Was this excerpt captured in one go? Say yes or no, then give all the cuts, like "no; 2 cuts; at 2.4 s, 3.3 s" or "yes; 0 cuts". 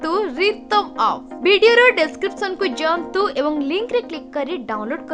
yes; 0 cuts